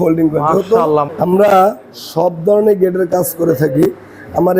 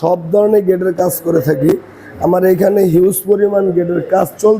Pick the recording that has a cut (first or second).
first